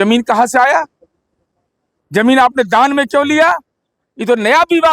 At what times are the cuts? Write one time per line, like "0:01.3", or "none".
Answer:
none